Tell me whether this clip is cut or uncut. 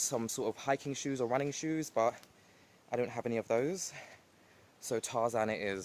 uncut